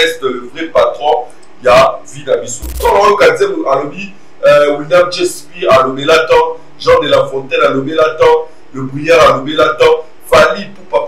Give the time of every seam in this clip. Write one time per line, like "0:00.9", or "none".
0:02.8

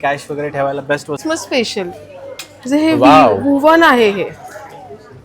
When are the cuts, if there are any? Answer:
0:01.2

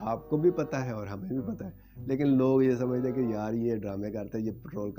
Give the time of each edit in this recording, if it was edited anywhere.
none

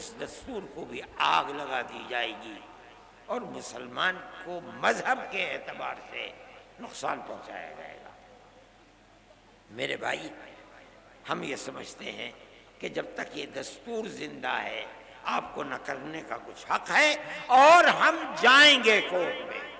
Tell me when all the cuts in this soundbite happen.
none

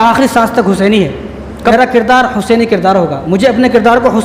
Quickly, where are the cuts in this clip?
0:01.7

